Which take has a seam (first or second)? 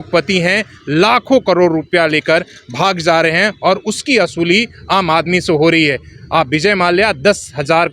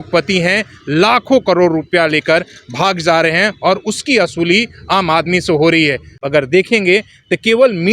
second